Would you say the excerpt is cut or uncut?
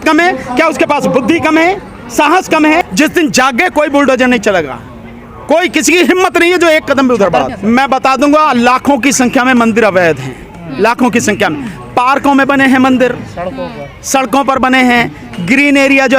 cut